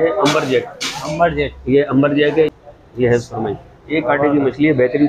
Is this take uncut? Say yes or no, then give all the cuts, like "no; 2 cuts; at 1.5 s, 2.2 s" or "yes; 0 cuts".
no; 1 cut; at 2.5 s